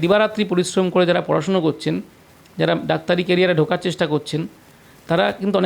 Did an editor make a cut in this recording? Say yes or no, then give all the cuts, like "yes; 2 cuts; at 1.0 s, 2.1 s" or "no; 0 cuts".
no; 0 cuts